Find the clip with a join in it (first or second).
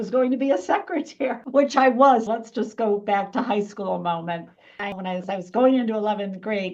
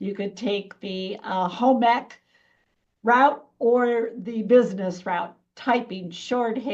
first